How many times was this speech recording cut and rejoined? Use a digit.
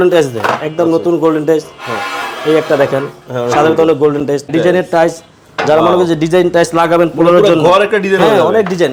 1